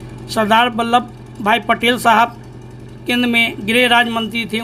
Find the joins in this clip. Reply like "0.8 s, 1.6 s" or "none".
none

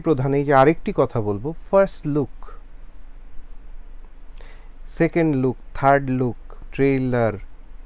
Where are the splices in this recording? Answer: none

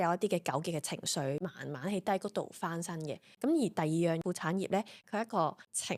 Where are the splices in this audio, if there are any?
none

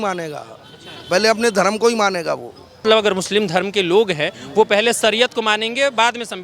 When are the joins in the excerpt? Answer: 2.8 s

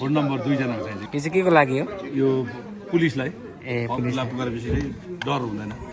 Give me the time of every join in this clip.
1.0 s

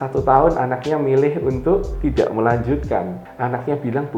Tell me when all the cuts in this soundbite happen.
3.2 s

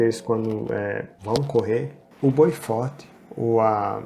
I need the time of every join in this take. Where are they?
1.1 s, 2.0 s

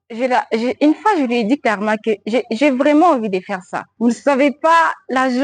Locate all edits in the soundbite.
3.8 s

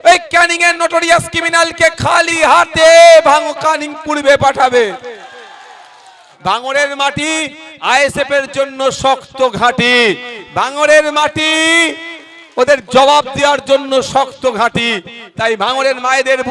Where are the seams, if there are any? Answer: 6.2 s

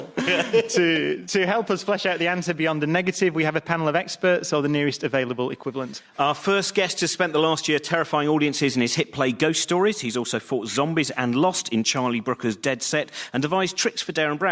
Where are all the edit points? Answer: 1.1 s

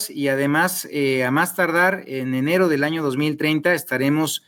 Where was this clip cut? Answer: none

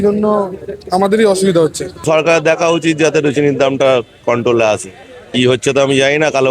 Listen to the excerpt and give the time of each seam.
2.0 s

